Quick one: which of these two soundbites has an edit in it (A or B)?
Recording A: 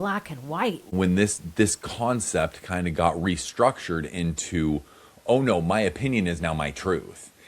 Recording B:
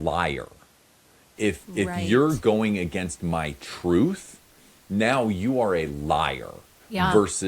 A